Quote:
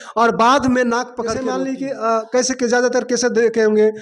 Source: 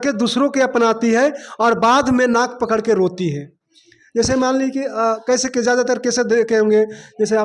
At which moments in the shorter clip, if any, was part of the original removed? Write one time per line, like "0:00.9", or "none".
0:01.4